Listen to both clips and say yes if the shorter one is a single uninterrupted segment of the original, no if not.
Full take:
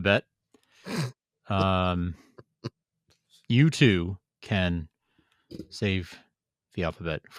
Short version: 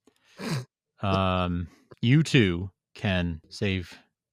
no